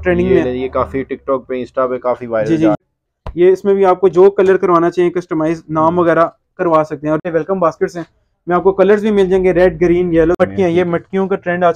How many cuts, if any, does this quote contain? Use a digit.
3